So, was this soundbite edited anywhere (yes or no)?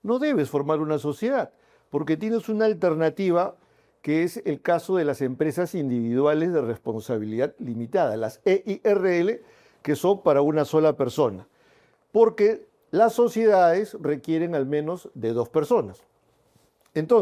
no